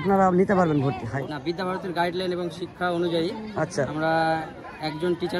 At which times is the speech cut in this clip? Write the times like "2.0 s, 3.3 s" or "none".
1.1 s